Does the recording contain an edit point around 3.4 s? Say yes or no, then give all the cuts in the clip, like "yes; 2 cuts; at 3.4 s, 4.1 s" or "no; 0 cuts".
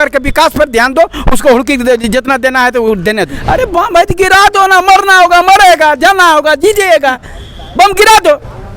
yes; 1 cut; at 3.4 s